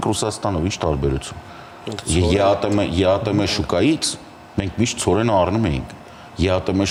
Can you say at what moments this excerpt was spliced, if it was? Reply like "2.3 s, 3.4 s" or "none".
none